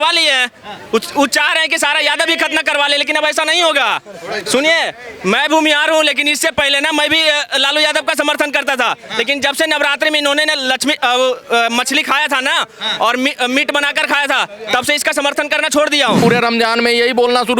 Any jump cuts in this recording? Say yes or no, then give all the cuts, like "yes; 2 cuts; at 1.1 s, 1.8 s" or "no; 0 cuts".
yes; 1 cut; at 16.2 s